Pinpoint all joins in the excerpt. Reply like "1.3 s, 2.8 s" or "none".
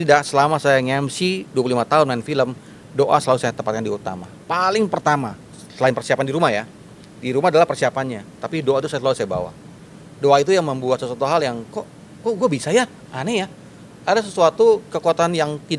none